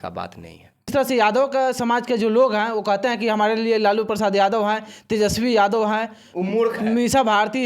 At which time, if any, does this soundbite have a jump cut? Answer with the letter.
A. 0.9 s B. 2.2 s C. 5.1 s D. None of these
A